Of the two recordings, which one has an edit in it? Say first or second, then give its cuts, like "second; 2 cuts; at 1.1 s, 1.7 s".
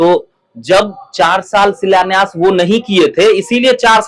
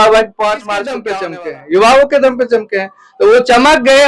second; 1 cut; at 1.0 s